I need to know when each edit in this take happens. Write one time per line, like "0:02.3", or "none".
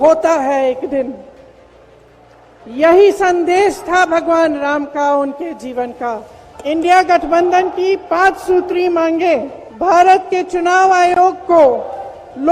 0:02.5
0:06.4
0:09.6